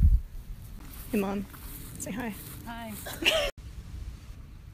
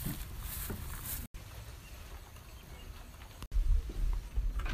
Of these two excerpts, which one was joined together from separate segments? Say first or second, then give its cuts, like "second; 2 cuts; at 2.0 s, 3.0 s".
second; 2 cuts; at 1.3 s, 3.5 s